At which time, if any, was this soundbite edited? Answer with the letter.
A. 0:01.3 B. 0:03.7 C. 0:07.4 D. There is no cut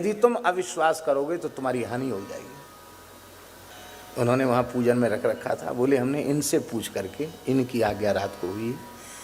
B